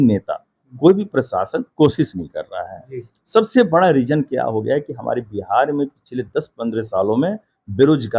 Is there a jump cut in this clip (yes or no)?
no